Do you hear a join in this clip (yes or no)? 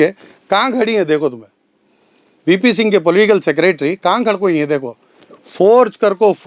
no